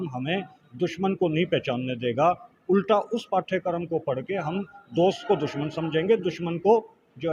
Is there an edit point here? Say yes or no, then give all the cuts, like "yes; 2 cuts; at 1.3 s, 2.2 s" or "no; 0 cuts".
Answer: no; 0 cuts